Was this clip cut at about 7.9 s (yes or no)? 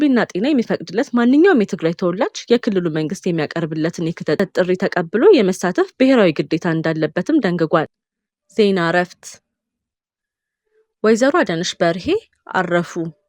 yes